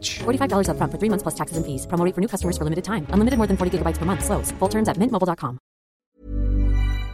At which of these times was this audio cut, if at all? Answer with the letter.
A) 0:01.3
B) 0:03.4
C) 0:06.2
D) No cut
C